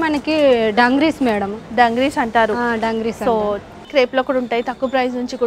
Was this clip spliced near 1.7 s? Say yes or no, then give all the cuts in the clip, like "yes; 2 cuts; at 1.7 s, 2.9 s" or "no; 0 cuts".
no; 1 cut; at 3.7 s